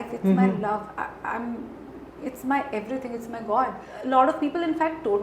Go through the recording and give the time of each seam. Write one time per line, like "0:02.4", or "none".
0:03.9